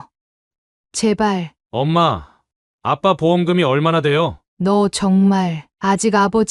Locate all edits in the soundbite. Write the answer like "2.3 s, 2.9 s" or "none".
1.6 s